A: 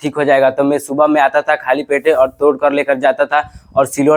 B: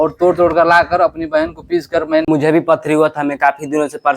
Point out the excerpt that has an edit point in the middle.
B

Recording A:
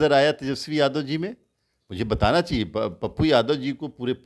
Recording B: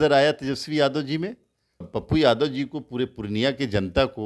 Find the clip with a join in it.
B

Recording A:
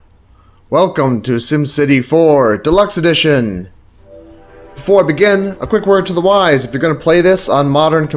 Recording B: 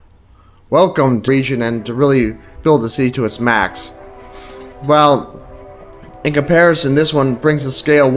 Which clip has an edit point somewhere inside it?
A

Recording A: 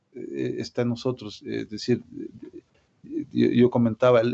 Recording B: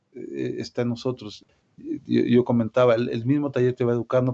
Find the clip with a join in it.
B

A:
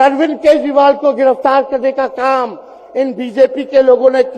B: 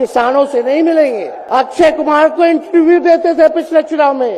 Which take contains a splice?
B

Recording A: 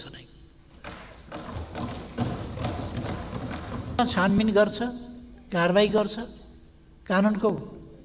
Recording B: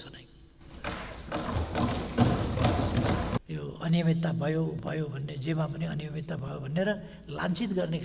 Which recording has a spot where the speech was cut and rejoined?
B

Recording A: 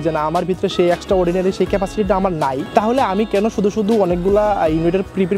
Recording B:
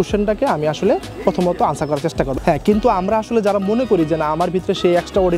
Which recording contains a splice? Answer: B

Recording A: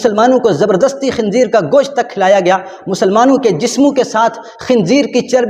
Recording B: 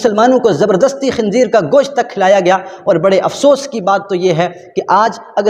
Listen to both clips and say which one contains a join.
B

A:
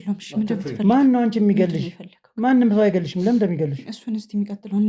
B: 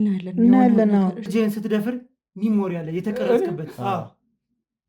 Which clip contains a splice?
B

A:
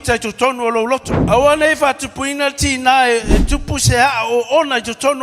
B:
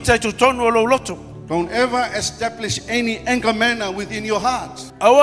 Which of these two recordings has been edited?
A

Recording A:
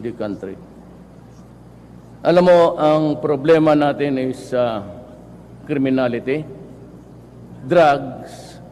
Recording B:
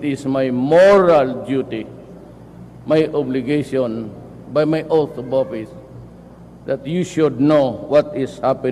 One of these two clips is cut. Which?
A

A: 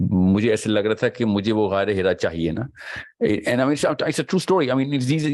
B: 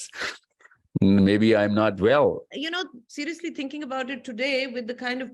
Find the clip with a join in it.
B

